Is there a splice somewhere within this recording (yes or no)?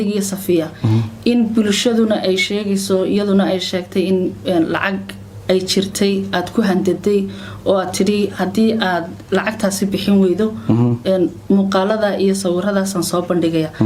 no